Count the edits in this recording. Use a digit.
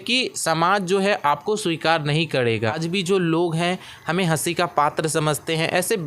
1